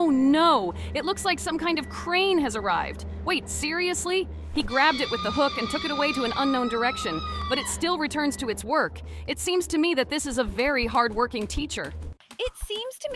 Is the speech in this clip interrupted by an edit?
no; 0 cuts

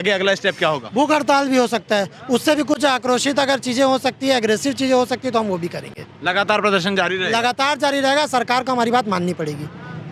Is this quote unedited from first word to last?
yes; 0 cuts

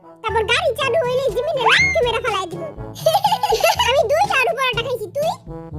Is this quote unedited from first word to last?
no; 1 cut; at 3.9 s

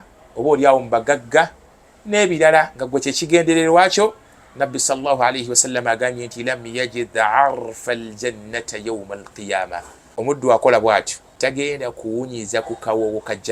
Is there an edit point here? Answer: yes; 2 cuts; at 10.3 s, 11.2 s

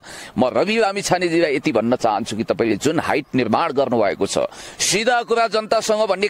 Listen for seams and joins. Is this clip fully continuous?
yes; 0 cuts

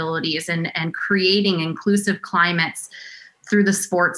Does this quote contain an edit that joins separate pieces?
no; 0 cuts

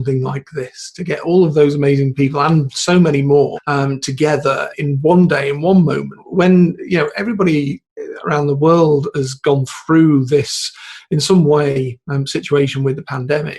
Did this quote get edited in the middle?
yes; 3 cuts; at 3.6 s, 4.7 s, 6.2 s

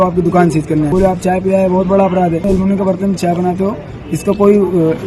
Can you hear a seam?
yes; 2 cuts; at 0.9 s, 2.4 s

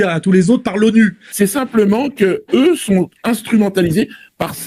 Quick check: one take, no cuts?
no; 2 cuts; at 1.2 s, 3.1 s

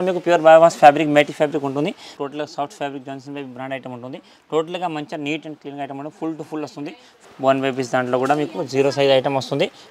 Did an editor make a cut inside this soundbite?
yes; 2 cuts; at 2.1 s, 7.2 s

